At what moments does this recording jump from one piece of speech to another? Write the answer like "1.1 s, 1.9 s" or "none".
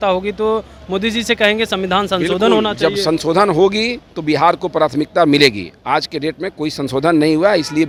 none